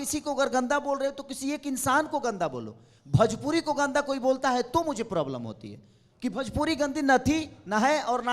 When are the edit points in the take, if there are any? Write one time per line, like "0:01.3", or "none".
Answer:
none